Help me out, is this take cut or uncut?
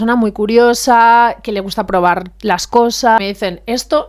cut